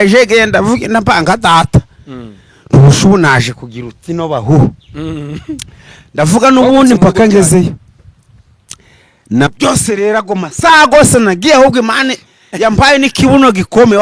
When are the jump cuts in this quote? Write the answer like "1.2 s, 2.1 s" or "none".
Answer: 9.5 s